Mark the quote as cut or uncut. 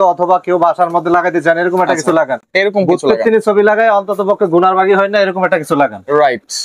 uncut